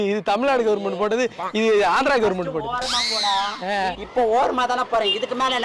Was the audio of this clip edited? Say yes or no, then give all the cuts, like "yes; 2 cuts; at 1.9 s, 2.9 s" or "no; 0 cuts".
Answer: yes; 1 cut; at 4.0 s